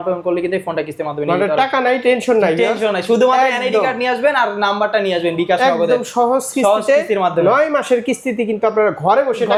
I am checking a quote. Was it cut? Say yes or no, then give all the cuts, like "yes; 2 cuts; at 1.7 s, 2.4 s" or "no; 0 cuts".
no; 0 cuts